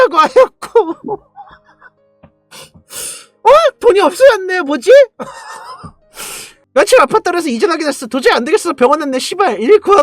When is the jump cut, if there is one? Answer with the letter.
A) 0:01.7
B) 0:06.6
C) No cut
B